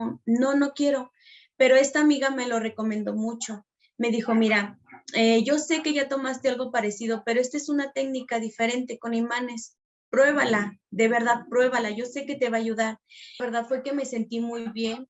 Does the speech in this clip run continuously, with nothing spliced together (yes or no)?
no